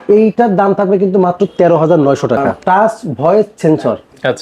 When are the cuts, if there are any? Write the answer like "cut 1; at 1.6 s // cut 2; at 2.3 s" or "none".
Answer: cut 1; at 2.5 s